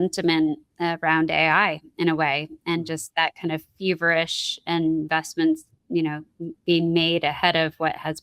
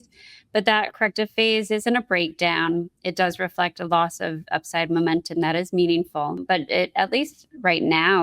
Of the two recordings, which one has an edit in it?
second; 1 cut; at 6.4 s

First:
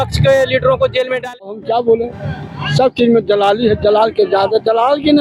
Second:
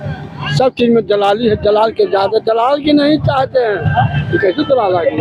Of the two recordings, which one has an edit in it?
first; 1 cut; at 1.2 s

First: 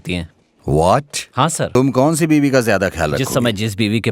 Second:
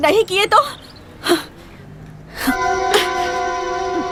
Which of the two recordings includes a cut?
first; 1 cut; at 1.8 s

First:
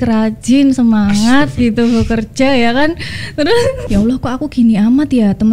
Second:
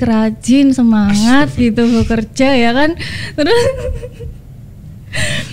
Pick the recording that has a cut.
first; 1 cut; at 3.8 s

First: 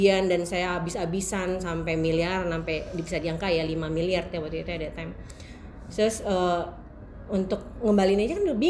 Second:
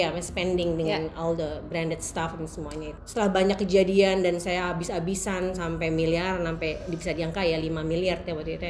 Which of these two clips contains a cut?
second; 1 cut; at 2.9 s

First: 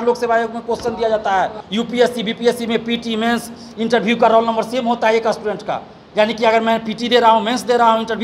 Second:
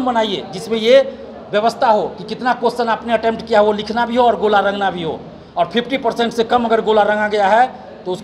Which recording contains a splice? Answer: first; 1 cut; at 1.6 s

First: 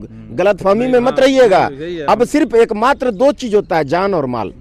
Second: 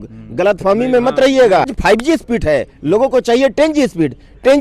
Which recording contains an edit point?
second; 1 cut; at 1.7 s

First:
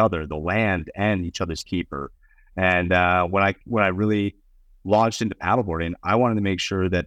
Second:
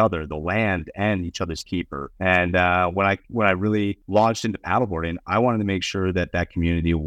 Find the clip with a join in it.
second; 2 cuts; at 2.0 s, 4.0 s

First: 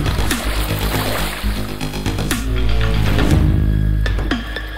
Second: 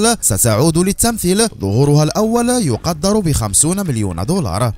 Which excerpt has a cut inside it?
first; 1 cut; at 3.1 s

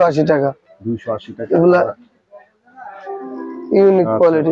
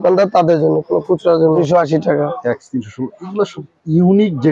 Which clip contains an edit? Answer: second; 1 cut; at 1.6 s

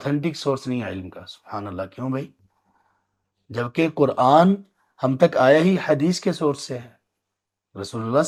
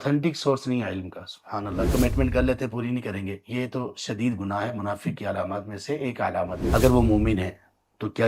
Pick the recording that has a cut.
second; 2 cuts; at 1.9 s, 6.6 s

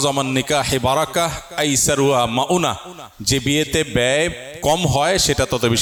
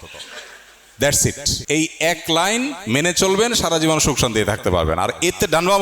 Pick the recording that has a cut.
second; 1 cut; at 1.5 s

